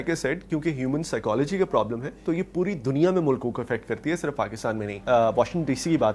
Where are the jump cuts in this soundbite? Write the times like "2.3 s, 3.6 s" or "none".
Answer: 5.0 s